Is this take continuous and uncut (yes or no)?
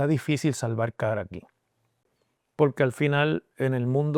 no